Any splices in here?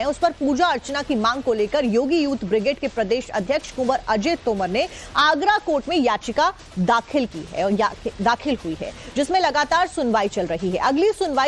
no; 0 cuts

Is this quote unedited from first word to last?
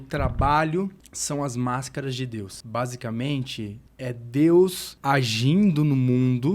no; 4 cuts; at 1.1 s, 2.6 s, 3.8 s, 4.9 s

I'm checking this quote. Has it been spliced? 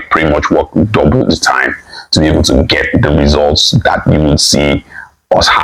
no; 0 cuts

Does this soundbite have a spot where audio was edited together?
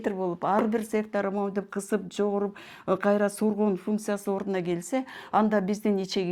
no; 0 cuts

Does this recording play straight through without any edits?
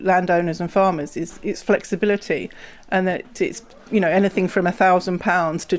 yes; 0 cuts

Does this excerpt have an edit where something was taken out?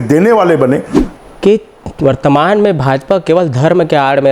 yes; 1 cut; at 1.0 s

